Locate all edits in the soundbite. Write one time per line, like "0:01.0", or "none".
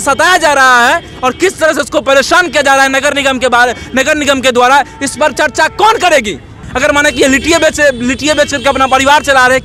none

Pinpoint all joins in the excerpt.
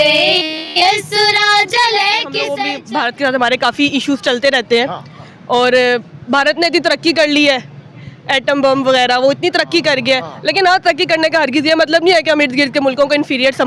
0:02.6

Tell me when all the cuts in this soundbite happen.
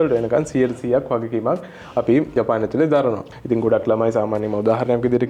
0:02.3
0:03.3

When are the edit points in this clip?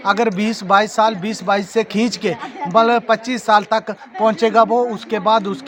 none

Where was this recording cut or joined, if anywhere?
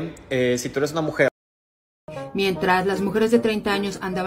0:02.0

